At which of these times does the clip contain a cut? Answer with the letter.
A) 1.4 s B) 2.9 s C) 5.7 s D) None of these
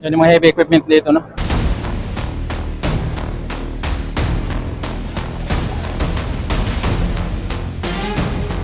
A